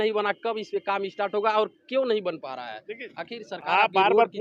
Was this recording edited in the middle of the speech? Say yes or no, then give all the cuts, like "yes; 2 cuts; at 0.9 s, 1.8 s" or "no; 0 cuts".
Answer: no; 0 cuts